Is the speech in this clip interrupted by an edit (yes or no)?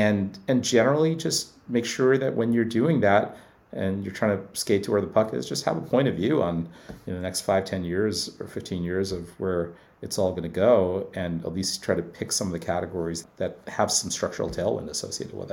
yes